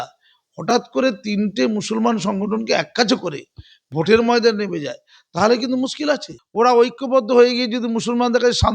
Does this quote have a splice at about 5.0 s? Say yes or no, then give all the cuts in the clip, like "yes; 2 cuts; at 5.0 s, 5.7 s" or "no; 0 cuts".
no; 1 cut; at 6.4 s